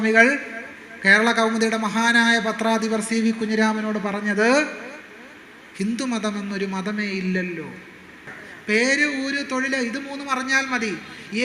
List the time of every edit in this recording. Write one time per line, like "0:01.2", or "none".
0:08.4